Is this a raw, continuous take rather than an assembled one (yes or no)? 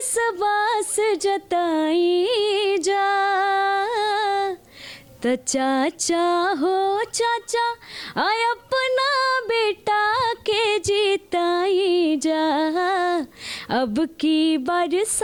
yes